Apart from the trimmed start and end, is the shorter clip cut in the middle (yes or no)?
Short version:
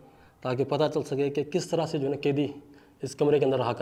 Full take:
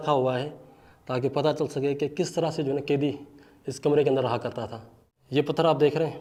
no